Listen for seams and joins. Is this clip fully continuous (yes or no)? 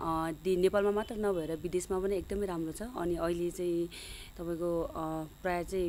yes